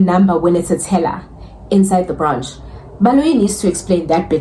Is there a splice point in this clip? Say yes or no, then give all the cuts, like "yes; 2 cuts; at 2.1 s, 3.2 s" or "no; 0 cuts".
no; 0 cuts